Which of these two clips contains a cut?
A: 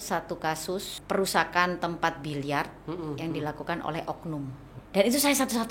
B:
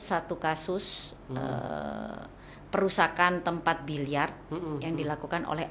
A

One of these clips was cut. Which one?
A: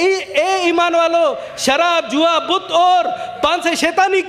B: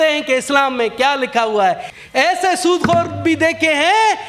B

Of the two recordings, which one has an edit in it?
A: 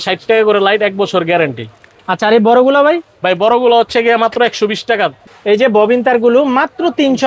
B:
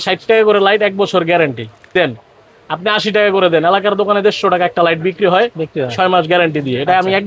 A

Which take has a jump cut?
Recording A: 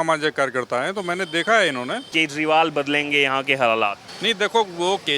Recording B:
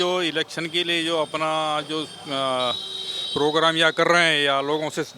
A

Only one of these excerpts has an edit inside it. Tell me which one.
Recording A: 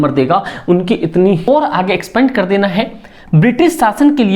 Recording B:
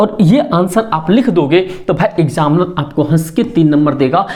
A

